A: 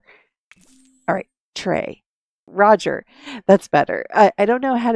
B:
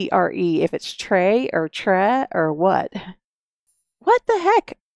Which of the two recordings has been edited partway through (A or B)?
A